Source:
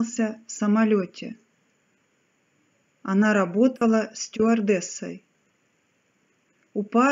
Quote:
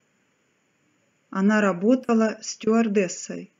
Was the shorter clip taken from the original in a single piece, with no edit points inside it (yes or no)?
yes